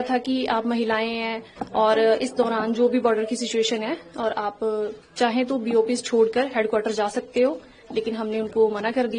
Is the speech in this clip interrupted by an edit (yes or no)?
no